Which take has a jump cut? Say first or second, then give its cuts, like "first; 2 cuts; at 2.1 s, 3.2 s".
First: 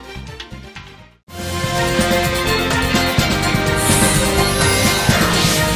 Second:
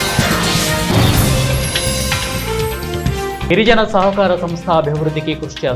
second; 1 cut; at 3.5 s